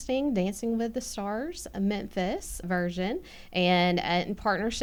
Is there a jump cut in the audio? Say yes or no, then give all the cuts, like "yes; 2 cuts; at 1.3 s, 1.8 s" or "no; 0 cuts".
no; 0 cuts